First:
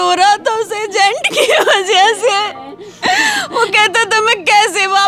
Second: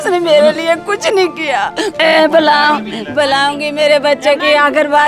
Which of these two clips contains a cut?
second; 1 cut; at 2.0 s

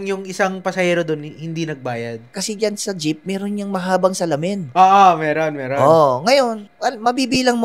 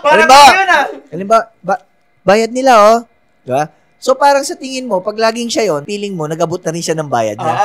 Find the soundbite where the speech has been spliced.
first; 1 cut; at 2.3 s

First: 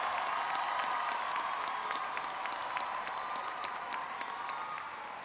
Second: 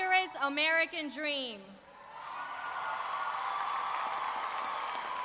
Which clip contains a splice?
second; 1 cut; at 3.1 s

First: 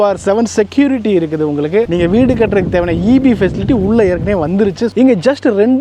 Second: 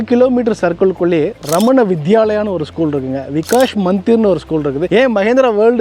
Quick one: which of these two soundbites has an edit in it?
first; 2 cuts; at 1.9 s, 4.9 s

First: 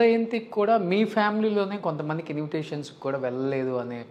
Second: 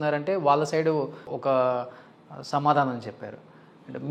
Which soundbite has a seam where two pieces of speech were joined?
second; 1 cut; at 1.3 s

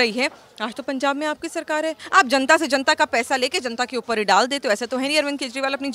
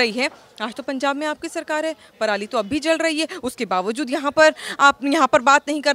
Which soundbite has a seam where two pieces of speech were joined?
first; 1 cut; at 2.0 s

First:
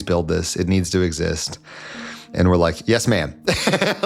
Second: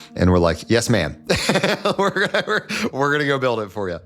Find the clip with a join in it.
second; 1 cut; at 2.9 s

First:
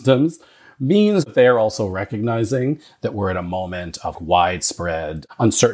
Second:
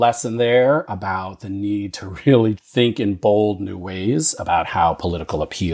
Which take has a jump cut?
first; 2 cuts; at 1.3 s, 4.2 s

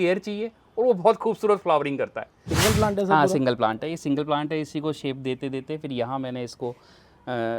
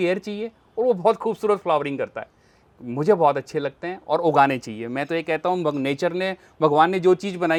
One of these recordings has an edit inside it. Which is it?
first; 1 cut; at 2.5 s

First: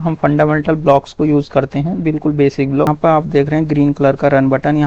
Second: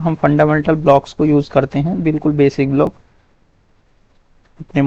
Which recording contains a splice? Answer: first; 1 cut; at 3.0 s

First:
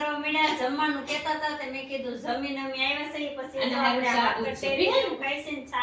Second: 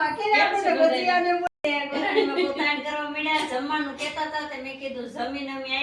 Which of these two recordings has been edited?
second; 1 cut; at 1.5 s

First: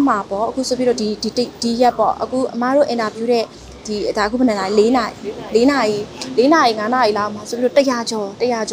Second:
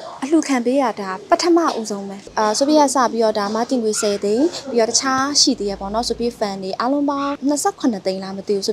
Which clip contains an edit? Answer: second; 2 cuts; at 2.2 s, 7.4 s

